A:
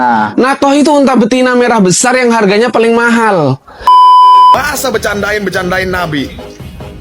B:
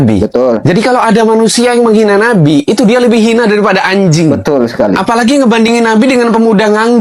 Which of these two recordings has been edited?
A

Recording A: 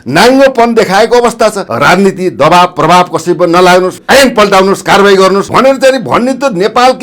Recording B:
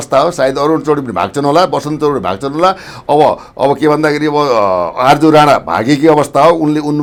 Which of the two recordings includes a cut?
A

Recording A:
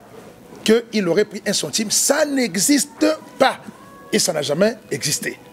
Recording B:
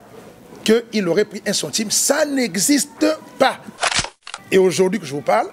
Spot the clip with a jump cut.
B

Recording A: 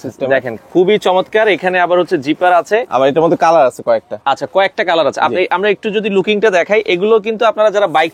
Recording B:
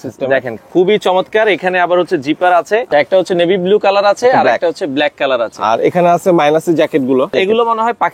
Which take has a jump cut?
B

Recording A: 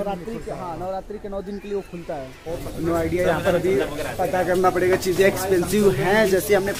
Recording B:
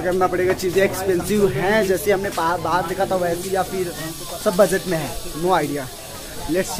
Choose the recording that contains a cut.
A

